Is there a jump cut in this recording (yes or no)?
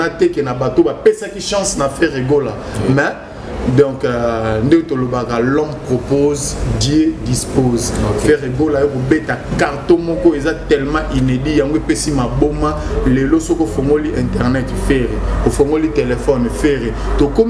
no